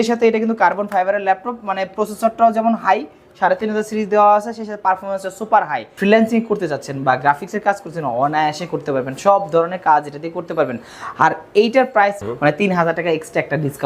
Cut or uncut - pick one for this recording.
cut